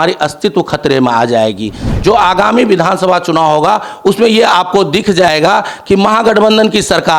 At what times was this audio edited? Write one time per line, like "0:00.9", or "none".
0:01.9